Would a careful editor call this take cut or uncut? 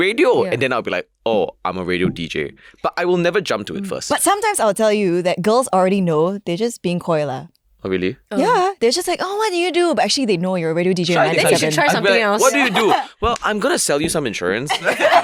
uncut